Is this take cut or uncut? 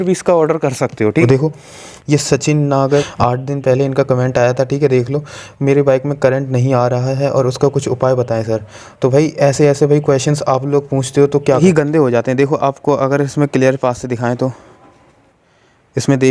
cut